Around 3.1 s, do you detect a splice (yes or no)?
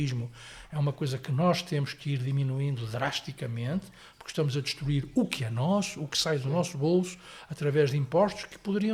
no